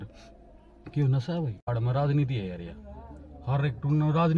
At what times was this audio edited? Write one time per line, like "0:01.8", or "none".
0:01.7